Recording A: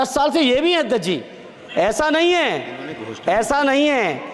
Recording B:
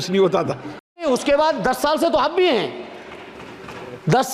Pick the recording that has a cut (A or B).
B